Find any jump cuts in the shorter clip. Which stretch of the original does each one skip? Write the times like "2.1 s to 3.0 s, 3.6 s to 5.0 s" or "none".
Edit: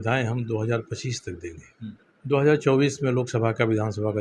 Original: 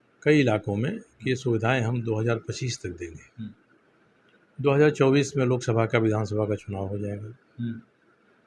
3.7 s to 4.4 s